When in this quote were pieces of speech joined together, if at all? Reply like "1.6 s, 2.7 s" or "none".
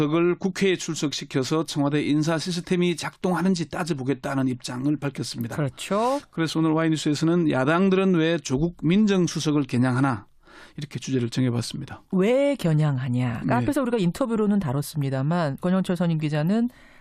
11.7 s

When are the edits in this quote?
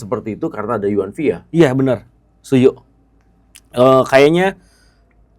none

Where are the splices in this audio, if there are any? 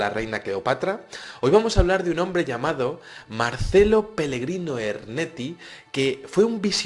3.8 s

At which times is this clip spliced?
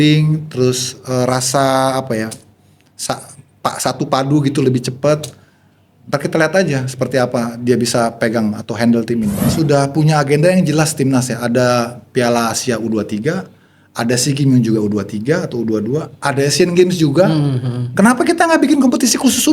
9.4 s

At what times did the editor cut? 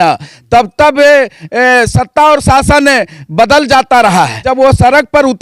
4.5 s

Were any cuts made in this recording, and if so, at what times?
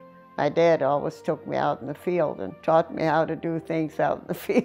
none

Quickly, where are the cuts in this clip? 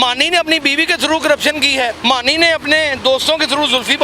2.0 s

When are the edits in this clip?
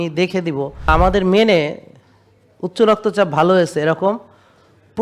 0.9 s

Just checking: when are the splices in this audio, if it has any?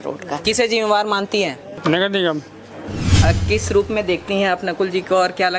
1.7 s, 3.0 s

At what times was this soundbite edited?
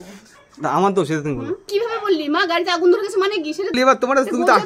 1.7 s, 3.7 s

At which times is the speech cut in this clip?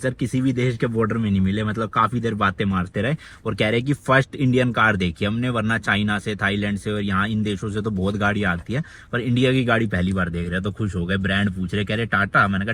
none

